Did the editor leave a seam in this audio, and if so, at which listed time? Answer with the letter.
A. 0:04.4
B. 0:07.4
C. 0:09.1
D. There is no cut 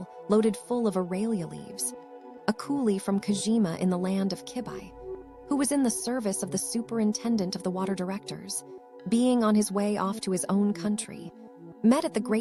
D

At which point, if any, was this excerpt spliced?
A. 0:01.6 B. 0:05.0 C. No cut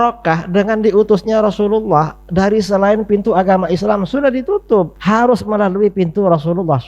B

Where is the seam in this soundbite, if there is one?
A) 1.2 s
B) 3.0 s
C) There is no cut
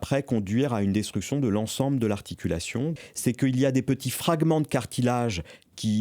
B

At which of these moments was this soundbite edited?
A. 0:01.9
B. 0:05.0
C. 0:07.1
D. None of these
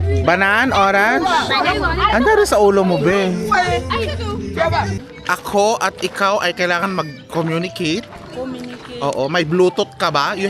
B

